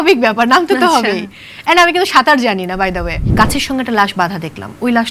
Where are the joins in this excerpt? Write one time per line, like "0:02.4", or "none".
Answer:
0:03.3